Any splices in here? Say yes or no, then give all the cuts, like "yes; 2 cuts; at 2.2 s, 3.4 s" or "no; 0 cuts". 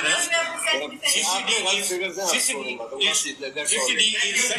no; 0 cuts